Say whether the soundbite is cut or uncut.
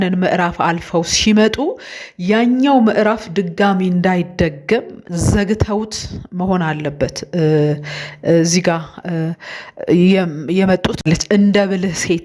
cut